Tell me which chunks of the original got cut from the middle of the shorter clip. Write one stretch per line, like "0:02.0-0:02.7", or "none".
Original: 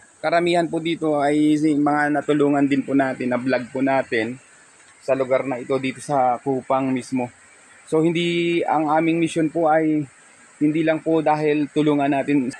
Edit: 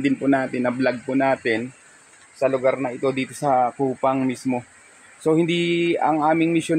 none